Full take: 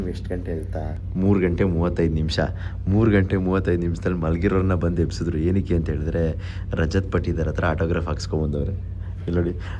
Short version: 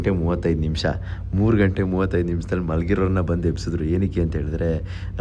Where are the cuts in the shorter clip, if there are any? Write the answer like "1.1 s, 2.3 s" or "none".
none